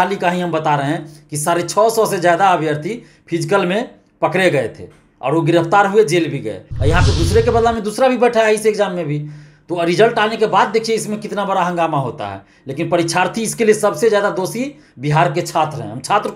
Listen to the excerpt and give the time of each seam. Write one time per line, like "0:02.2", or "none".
0:06.7